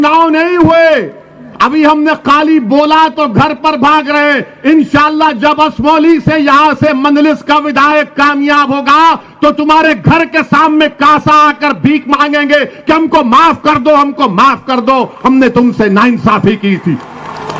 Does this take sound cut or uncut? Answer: uncut